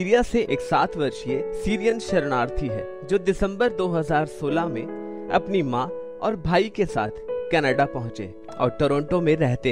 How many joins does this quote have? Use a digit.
0